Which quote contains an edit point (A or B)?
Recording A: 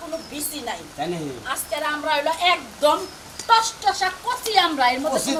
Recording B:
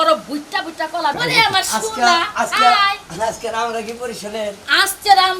B